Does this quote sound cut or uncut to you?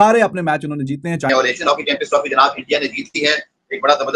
cut